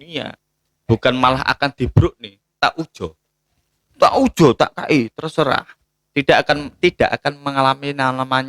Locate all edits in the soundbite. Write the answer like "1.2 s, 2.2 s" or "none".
none